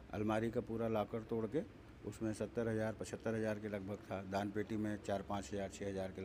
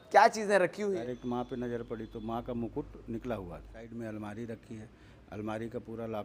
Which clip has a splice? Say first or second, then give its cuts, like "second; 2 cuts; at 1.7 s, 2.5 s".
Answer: second; 2 cuts; at 0.8 s, 3.9 s